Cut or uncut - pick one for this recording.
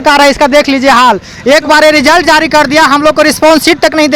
uncut